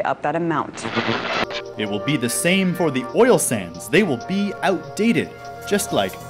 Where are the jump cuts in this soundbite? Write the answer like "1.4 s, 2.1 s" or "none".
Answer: 1.3 s